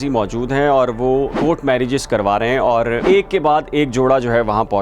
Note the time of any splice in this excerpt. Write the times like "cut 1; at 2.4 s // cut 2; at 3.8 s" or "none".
cut 1; at 1.4 s // cut 2; at 3.0 s

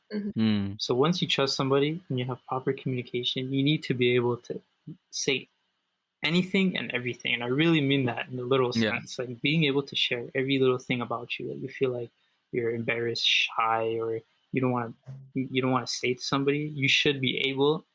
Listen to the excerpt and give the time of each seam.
none

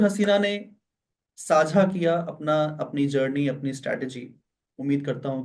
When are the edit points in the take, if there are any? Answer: none

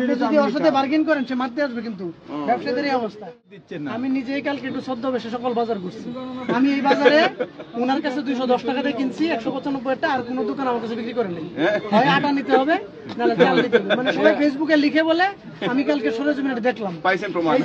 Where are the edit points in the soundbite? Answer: cut 1; at 3.6 s

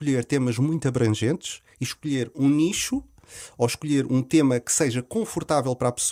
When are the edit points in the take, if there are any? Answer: none

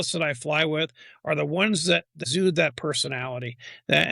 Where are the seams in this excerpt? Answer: cut 1; at 2.2 s

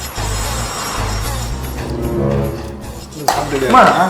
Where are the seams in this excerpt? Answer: cut 1; at 1.7 s

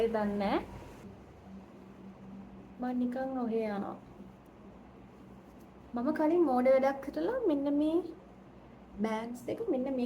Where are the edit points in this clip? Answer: cut 1; at 1.0 s // cut 2; at 5.8 s

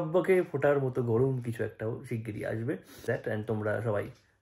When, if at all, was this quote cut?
cut 1; at 3.0 s

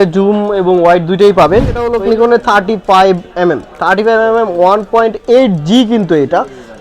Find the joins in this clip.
cut 1; at 1.9 s

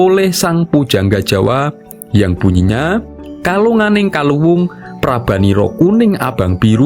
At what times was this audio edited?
cut 1; at 1.9 s

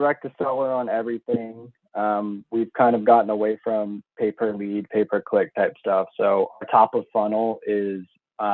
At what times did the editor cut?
none

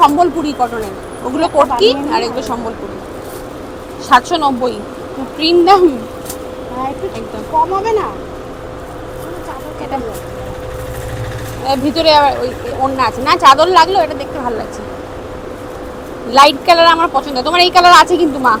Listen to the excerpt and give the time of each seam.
none

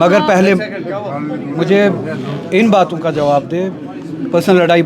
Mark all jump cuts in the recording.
none

